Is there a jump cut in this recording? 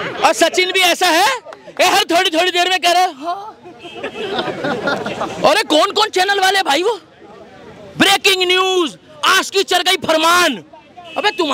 no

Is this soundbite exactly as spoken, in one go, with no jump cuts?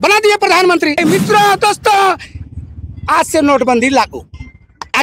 no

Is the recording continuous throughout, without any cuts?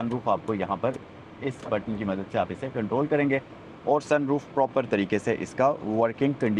yes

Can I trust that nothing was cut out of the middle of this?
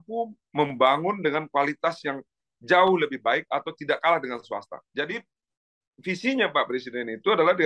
no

